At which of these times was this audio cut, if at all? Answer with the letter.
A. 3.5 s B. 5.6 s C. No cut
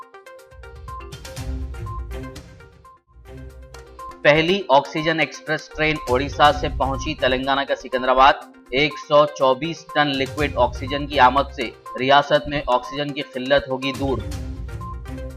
A